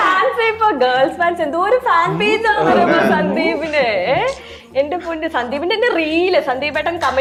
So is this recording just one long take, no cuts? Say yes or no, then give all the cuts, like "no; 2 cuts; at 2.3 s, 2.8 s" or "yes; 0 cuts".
yes; 0 cuts